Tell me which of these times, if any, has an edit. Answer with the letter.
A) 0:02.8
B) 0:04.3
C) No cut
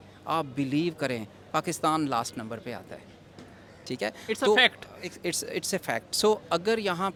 C